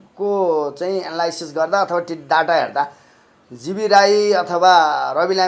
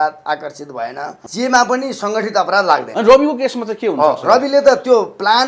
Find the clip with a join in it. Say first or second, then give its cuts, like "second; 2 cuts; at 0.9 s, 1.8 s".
second; 2 cuts; at 1.2 s, 2.9 s